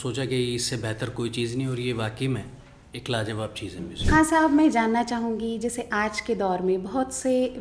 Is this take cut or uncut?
cut